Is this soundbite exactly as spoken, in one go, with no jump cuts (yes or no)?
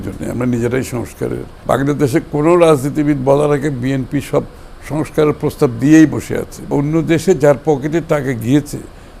no